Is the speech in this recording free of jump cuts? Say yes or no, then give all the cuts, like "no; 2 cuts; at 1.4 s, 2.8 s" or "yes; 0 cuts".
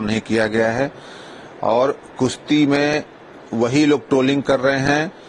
yes; 0 cuts